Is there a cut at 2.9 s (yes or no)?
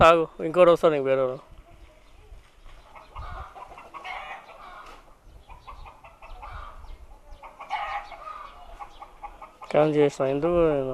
yes